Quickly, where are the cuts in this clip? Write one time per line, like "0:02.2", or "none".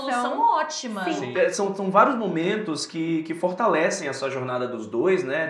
0:01.3

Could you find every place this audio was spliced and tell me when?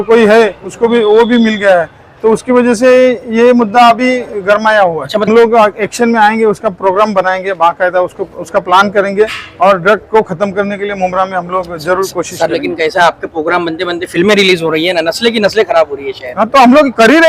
0:05.3

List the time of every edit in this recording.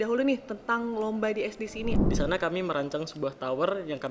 0:02.0

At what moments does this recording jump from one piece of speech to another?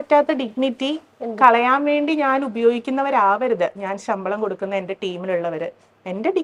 none

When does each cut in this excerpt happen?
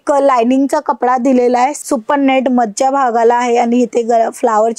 0:01.8

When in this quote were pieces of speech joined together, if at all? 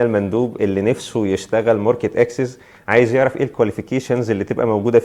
none

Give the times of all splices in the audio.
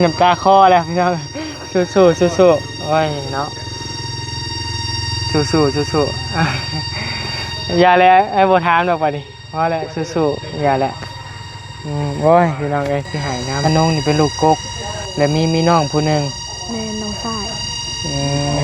0:13.5

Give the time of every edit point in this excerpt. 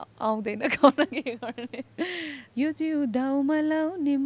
0:02.4

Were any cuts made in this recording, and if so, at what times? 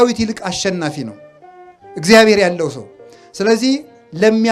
none

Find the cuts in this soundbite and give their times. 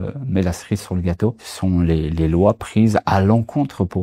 0:01.5

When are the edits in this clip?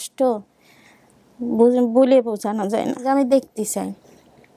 0:03.0

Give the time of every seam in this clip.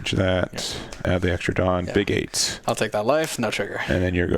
0:01.0
0:02.4

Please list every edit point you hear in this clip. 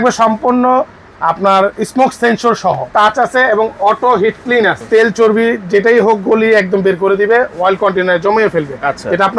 0:02.9
0:04.8

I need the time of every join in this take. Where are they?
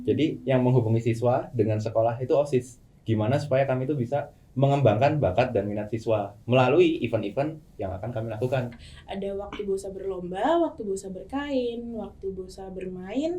0:08.7

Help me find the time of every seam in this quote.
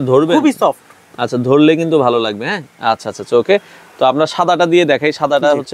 none

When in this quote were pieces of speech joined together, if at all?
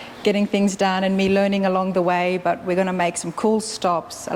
none

